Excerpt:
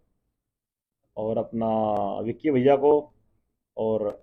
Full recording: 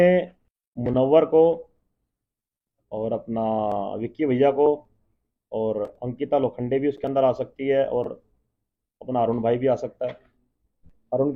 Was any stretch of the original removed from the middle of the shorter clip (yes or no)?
no